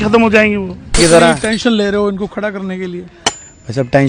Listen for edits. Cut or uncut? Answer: cut